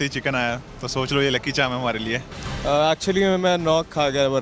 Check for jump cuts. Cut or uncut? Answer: cut